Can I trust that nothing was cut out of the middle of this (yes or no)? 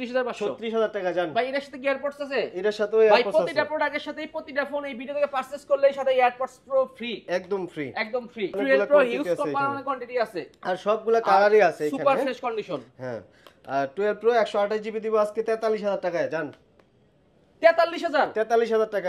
no